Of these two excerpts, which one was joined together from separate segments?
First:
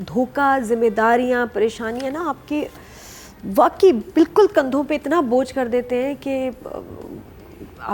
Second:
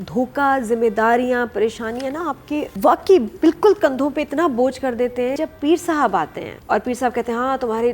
second; 3 cuts; at 2.7 s, 5.4 s, 6.5 s

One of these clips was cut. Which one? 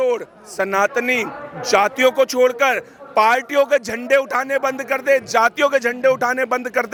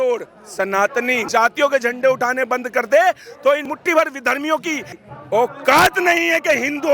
second; 2 cuts; at 1.3 s, 3.7 s

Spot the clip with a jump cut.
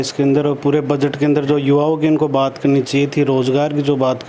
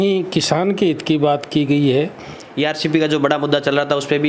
second; 1 cut; at 2.4 s

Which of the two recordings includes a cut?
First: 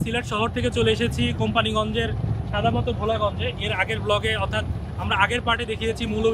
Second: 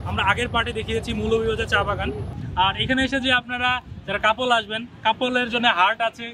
second; 1 cut; at 2.3 s

